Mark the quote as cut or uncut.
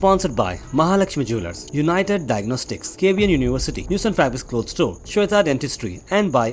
uncut